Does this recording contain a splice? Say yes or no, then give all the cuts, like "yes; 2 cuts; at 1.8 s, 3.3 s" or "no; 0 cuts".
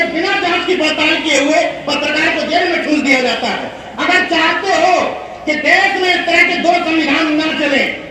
no; 0 cuts